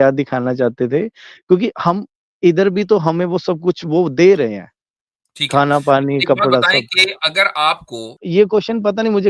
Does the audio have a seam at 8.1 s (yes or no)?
yes